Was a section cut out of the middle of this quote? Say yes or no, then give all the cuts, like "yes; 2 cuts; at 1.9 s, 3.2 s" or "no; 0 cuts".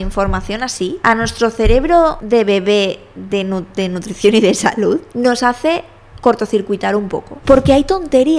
yes; 4 cuts; at 1.0 s, 2.2 s, 5.1 s, 7.3 s